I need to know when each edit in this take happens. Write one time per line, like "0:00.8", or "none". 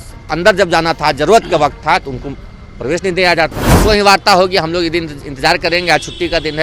0:03.8